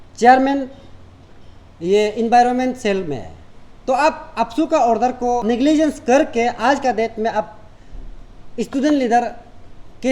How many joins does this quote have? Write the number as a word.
one